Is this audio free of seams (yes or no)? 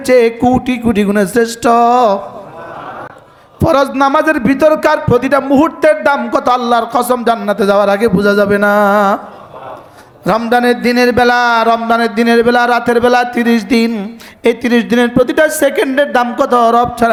yes